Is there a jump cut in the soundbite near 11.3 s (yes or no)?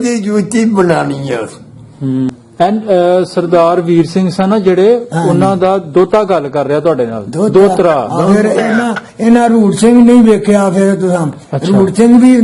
no